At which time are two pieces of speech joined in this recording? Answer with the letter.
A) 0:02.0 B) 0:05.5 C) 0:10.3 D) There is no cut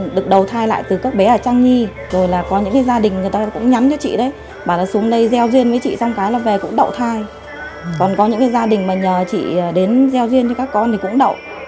A